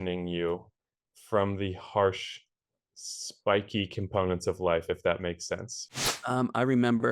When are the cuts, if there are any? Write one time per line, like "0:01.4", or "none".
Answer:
0:05.8

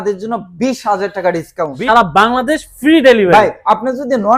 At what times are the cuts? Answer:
0:01.8

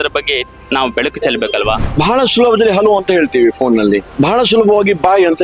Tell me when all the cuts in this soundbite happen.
0:01.8
0:04.1

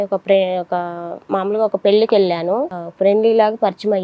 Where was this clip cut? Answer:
0:02.8

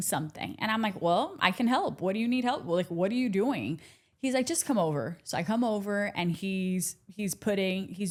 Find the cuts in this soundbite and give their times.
none

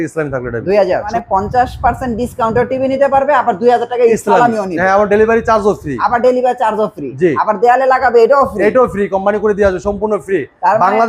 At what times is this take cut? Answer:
0:01.1

